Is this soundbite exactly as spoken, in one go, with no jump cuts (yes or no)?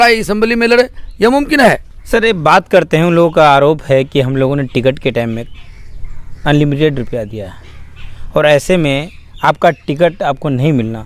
no